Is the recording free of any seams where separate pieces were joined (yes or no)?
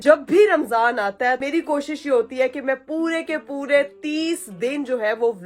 no